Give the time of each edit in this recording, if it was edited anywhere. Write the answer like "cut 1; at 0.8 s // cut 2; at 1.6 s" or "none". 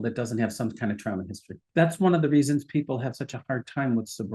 cut 1; at 1.6 s